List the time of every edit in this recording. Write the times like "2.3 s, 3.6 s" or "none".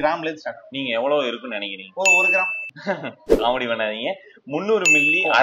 none